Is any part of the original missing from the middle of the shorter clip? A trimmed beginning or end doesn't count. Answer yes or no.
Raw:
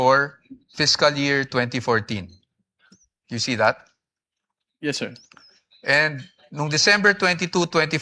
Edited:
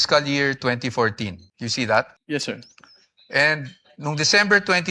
yes